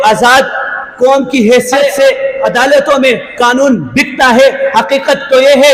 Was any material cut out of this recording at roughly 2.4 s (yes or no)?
yes